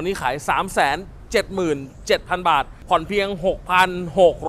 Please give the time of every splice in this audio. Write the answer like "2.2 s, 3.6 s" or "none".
2.7 s